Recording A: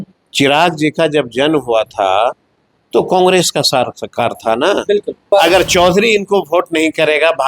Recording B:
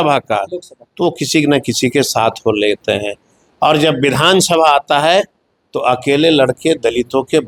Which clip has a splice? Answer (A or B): A